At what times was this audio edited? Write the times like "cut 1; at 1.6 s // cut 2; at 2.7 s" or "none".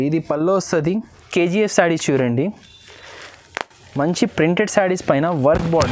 cut 1; at 1.2 s